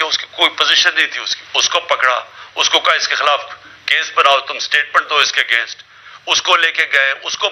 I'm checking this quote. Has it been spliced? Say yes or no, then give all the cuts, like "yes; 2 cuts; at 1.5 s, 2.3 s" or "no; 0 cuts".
no; 0 cuts